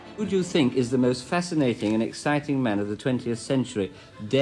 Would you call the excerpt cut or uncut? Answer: uncut